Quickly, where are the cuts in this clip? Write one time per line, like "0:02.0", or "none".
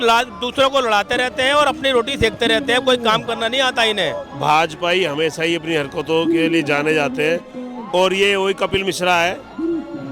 0:04.3

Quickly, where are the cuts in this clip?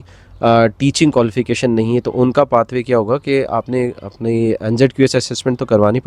none

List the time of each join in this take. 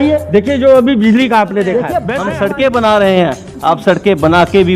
0:02.2

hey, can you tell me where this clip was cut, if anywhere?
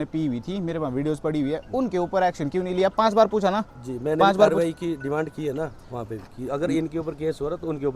none

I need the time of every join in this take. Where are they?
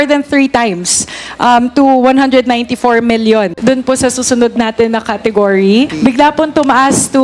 0:03.5

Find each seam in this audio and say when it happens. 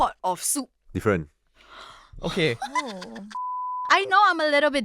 0:03.4

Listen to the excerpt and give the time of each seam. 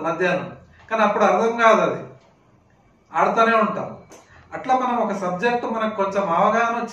none

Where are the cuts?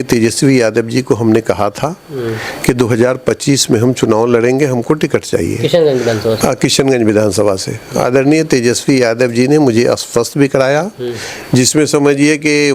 none

